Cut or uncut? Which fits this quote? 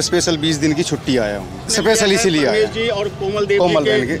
cut